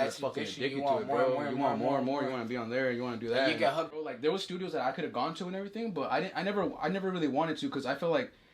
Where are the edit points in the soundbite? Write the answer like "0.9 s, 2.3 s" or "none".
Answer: 3.9 s